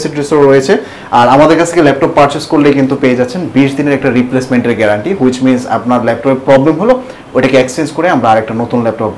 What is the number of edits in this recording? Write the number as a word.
zero